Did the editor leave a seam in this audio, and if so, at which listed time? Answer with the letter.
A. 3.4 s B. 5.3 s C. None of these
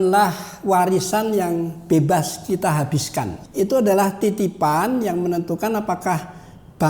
A